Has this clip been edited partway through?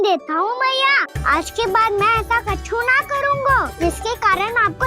yes; 2 cuts; at 1.1 s, 3.7 s

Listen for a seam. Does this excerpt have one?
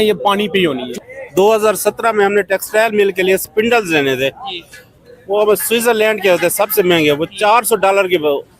yes; 1 cut; at 1.1 s

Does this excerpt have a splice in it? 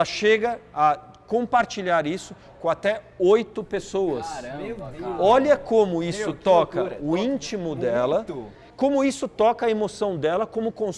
no; 0 cuts

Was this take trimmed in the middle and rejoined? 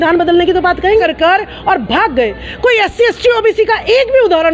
yes; 1 cut; at 1.0 s

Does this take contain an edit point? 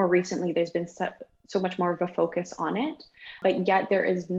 yes; 1 cut; at 3.4 s

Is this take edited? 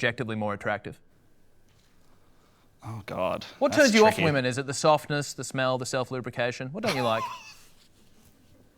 no; 0 cuts

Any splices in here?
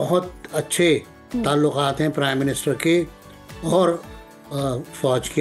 no; 0 cuts

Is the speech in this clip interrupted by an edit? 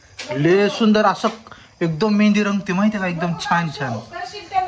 no; 0 cuts

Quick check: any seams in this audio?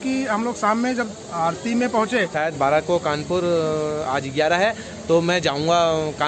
yes; 1 cut; at 2.3 s

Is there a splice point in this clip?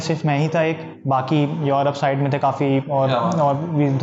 no; 0 cuts

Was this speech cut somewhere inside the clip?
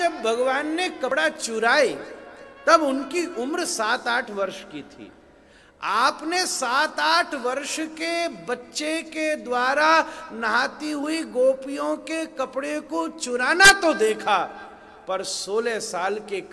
yes; 1 cut; at 1.1 s

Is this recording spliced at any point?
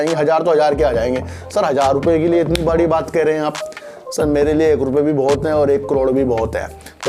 no; 0 cuts

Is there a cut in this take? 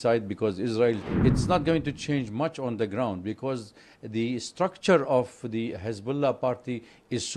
yes; 1 cut; at 1.0 s

